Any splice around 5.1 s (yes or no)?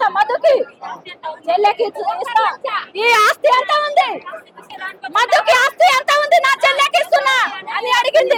no